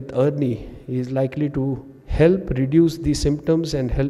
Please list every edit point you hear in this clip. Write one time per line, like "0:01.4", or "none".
none